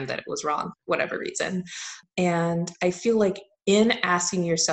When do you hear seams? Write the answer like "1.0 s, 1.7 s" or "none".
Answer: 2.0 s

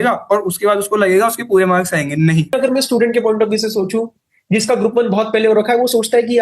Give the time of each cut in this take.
2.5 s

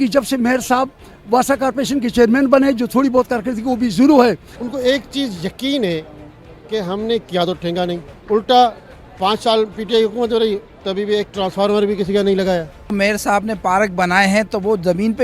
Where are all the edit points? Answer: 4.5 s, 12.8 s

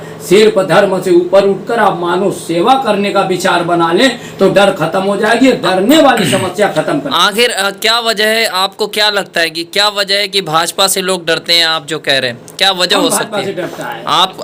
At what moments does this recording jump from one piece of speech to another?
none

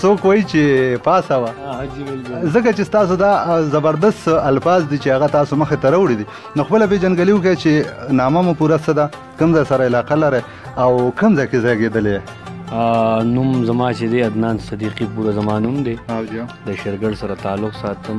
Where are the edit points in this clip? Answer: none

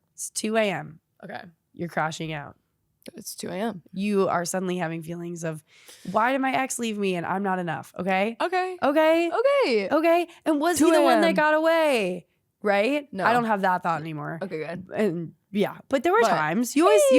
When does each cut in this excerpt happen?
3.8 s

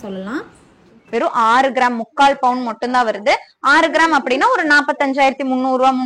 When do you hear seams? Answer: 0.9 s

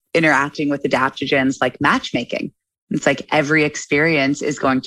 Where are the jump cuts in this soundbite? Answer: none

